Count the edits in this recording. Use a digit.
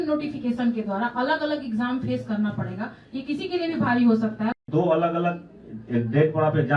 1